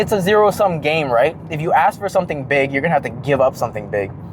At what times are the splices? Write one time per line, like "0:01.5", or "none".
none